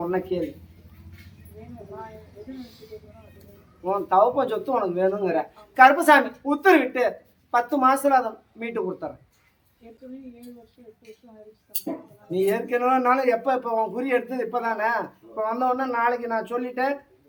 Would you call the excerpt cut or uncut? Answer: uncut